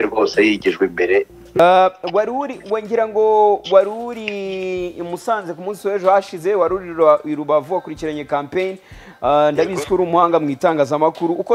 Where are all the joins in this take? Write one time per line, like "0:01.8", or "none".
0:01.6